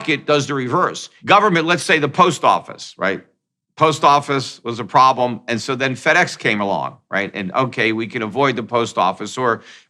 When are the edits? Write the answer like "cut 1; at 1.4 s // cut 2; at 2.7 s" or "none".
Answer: cut 1; at 1.1 s

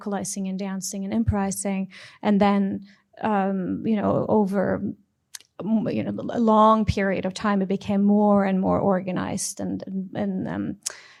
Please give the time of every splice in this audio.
none

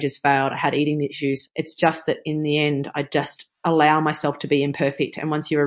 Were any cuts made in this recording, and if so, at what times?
cut 1; at 1.4 s // cut 2; at 3.4 s

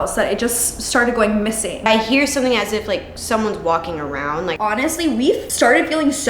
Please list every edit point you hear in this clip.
cut 1; at 1.9 s // cut 2; at 4.5 s // cut 3; at 5.5 s

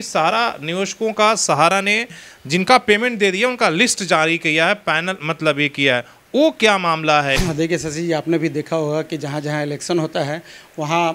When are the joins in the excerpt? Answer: cut 1; at 7.4 s

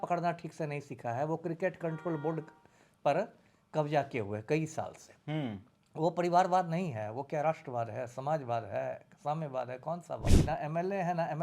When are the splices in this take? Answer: cut 1; at 10.3 s

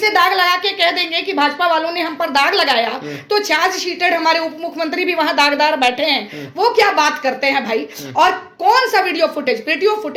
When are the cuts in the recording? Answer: none

